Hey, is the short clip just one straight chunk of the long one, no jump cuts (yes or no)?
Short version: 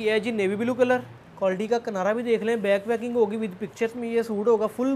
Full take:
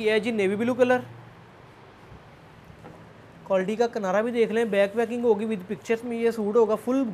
no